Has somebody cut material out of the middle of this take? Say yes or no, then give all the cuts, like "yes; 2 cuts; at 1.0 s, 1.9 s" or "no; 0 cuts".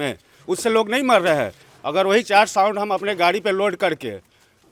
no; 0 cuts